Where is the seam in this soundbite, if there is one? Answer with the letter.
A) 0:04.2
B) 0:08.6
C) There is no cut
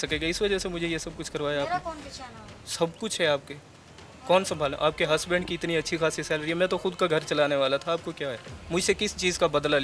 C